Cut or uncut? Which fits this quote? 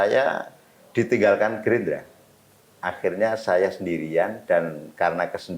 uncut